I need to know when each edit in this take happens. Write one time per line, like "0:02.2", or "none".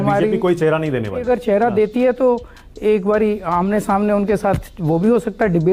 0:01.2

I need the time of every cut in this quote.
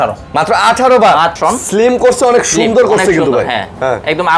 0:01.3

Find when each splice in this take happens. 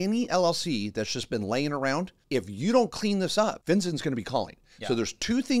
0:02.2
0:03.6

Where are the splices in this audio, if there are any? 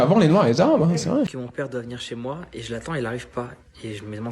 0:01.3

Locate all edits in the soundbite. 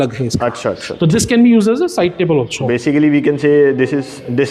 none

